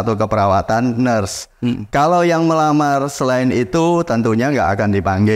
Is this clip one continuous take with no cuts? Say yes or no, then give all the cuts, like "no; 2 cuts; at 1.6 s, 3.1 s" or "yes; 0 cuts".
yes; 0 cuts